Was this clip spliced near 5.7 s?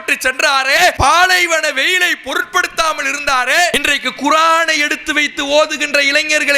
no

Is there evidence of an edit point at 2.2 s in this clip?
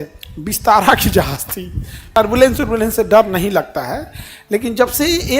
yes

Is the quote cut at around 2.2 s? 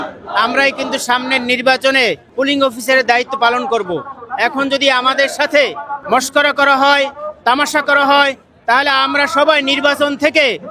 yes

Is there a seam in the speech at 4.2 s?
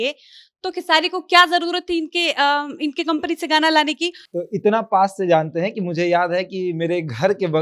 yes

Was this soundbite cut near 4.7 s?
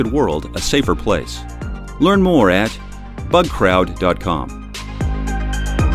yes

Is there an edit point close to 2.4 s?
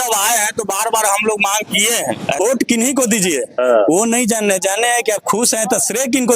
yes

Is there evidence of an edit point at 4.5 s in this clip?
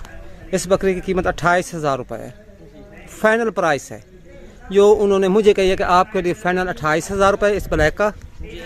no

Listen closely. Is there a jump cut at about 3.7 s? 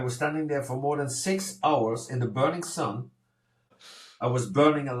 yes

